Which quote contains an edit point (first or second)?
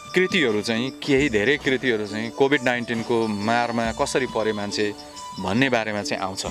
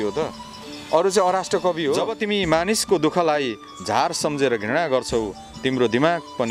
second